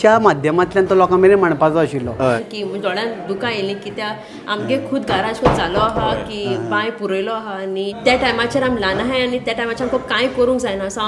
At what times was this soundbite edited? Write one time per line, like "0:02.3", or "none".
0:02.4
0:07.9

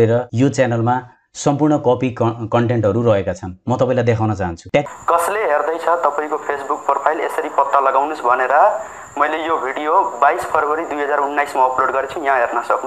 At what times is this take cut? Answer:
0:04.8

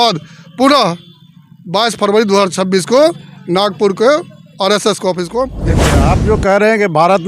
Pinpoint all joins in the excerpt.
0:05.9

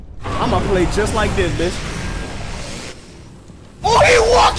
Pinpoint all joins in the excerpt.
none

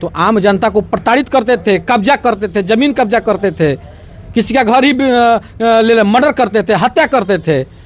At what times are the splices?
none

